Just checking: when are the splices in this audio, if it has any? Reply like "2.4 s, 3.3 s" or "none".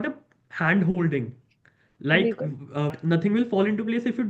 2.9 s